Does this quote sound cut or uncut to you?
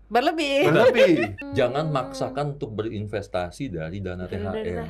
cut